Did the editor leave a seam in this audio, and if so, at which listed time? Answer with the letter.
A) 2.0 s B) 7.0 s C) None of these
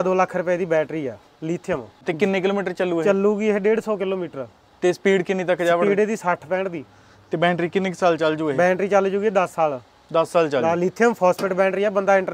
A